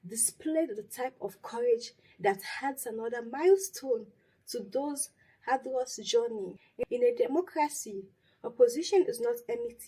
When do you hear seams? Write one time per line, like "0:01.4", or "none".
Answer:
0:06.6